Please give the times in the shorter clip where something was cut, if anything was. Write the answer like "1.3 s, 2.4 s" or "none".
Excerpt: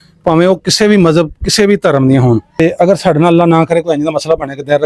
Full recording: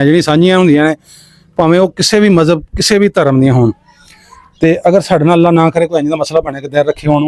2.5 s